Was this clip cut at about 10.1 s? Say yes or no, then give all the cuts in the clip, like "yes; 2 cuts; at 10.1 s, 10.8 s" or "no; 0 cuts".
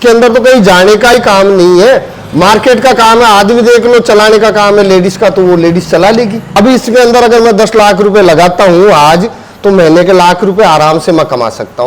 no; 1 cut; at 6.5 s